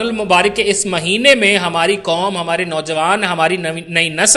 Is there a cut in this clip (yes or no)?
no